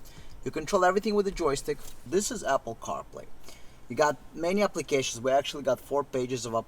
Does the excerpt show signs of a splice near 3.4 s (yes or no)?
no